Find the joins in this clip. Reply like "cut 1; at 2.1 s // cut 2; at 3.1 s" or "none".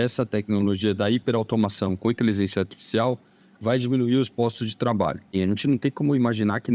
cut 1; at 5.4 s